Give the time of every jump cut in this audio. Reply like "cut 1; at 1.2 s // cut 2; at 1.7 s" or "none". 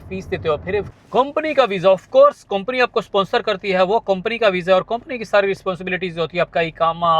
cut 1; at 1.0 s